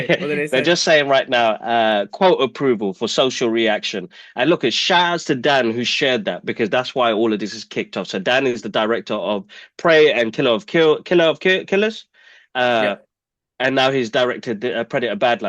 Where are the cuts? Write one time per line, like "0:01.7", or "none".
none